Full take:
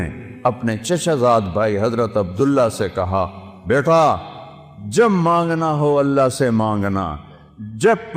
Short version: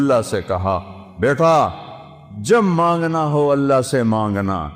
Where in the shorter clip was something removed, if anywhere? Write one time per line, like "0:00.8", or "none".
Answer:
none